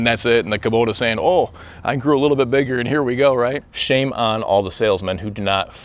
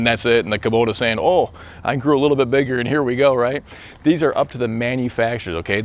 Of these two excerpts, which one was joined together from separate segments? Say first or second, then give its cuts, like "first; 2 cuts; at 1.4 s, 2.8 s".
first; 1 cut; at 3.7 s